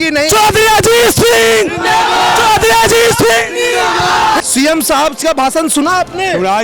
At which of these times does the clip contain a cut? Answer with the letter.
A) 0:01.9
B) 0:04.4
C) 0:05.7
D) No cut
B